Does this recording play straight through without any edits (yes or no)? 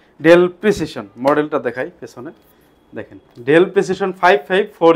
yes